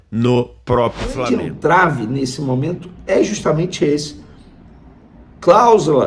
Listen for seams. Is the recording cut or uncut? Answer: cut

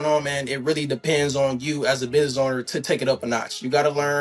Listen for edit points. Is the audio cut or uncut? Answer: uncut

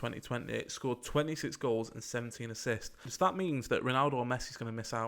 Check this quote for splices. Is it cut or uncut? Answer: cut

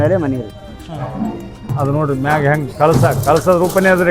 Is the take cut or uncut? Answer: cut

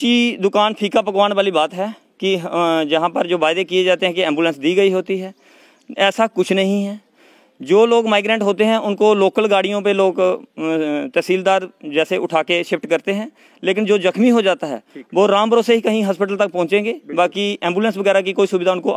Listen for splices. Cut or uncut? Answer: uncut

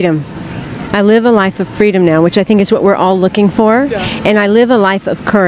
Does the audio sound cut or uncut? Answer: cut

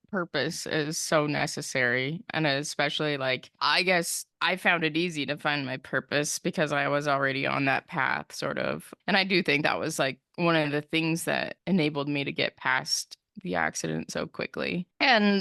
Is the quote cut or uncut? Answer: uncut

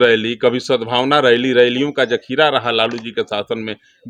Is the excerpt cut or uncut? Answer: uncut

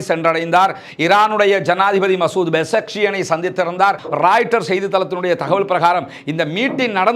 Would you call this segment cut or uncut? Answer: cut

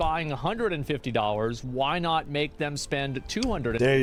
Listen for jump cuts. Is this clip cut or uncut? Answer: uncut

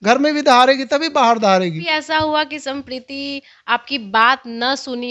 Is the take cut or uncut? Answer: cut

